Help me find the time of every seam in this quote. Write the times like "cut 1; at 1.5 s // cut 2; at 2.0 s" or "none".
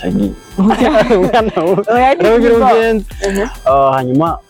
none